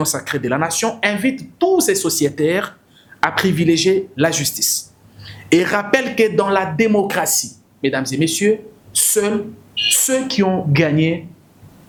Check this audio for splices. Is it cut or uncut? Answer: uncut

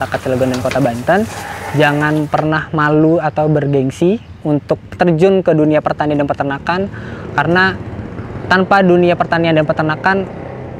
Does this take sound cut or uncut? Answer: uncut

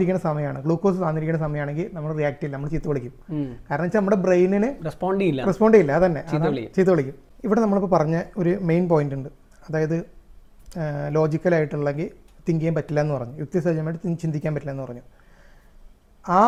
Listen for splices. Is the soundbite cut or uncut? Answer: uncut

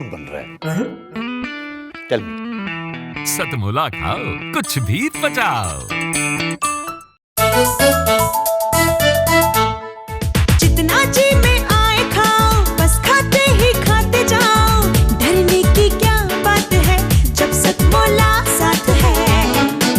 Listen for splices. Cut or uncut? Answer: cut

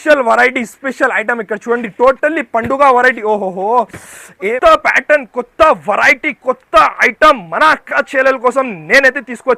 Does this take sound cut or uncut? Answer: cut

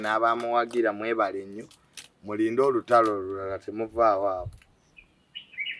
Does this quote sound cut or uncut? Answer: uncut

